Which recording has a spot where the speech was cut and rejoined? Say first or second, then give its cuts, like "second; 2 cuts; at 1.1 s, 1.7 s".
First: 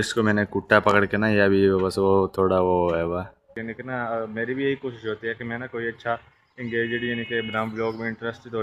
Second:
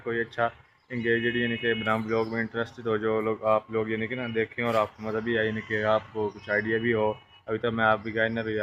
first; 1 cut; at 3.5 s